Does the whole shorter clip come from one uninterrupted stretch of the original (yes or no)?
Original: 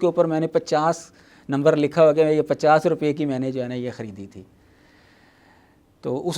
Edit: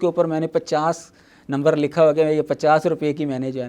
yes